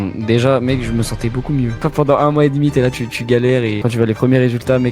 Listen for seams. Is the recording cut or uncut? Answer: cut